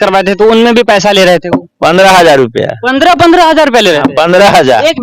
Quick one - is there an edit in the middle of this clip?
no; 0 cuts

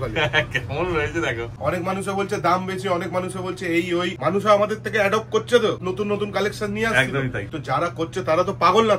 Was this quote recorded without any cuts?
no; 4 cuts; at 1.5 s, 4.2 s, 5.8 s, 7.5 s

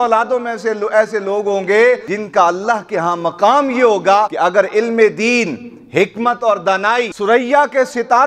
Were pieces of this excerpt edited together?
yes; 3 cuts; at 2.1 s, 4.3 s, 7.1 s

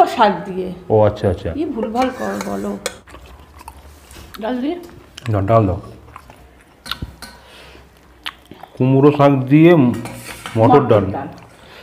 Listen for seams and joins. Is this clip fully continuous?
no; 2 cuts; at 3.1 s, 6.8 s

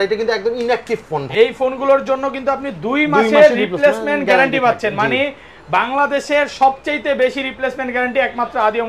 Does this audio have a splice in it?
yes; 1 cut; at 1.2 s

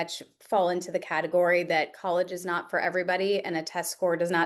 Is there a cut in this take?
no; 0 cuts

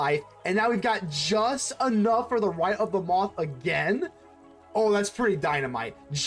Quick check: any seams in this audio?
no; 0 cuts

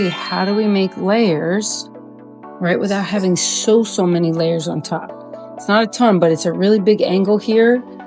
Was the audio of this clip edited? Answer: no; 0 cuts

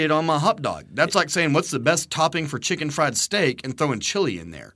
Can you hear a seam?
no; 0 cuts

